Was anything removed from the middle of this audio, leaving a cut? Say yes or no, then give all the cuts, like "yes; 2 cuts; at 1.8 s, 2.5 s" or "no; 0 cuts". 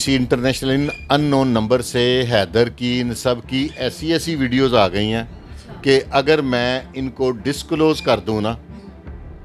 no; 0 cuts